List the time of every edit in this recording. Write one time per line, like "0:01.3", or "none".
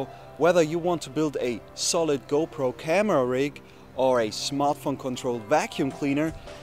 none